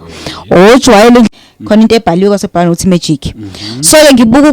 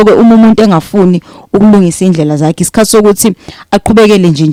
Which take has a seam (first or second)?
first